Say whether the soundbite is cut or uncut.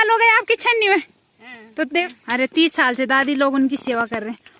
cut